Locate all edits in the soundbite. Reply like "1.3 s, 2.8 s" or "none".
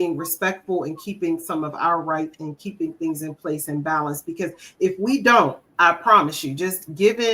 5.6 s